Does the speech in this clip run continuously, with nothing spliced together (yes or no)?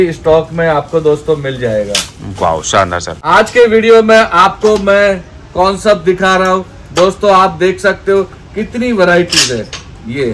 no